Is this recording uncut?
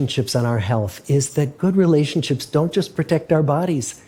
yes; 0 cuts

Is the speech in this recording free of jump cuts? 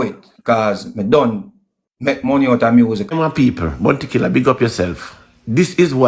no; 1 cut; at 3.1 s

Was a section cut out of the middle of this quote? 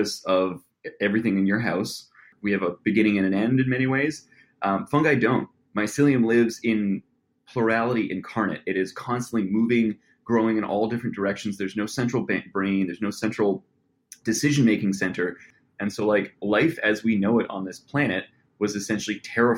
yes; 2 cuts; at 2.3 s, 15.5 s

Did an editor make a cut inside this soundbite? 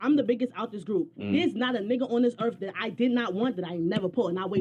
no; 0 cuts

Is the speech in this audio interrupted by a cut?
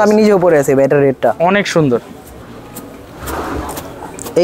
no; 0 cuts

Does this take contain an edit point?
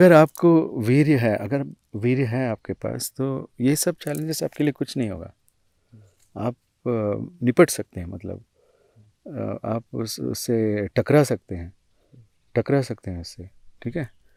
no; 0 cuts

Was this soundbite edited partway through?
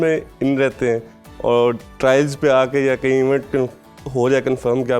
no; 0 cuts

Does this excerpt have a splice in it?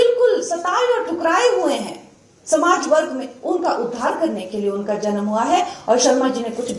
no; 0 cuts

